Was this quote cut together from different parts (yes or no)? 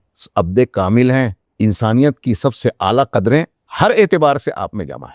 yes